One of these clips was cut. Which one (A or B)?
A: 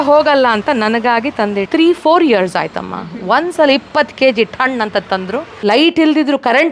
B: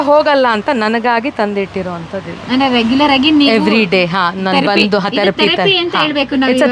A